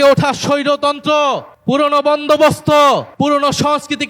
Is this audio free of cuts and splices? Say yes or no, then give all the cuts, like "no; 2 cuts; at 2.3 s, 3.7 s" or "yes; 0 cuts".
no; 2 cuts; at 1.5 s, 3.1 s